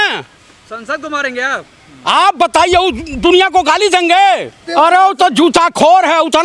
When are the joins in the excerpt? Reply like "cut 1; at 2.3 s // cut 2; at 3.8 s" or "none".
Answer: cut 1; at 4.6 s

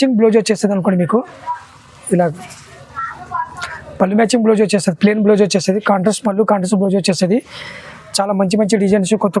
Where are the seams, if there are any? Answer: none

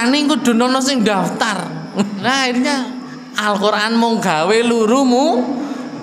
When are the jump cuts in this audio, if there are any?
cut 1; at 2.2 s

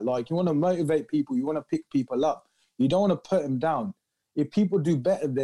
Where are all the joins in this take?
none

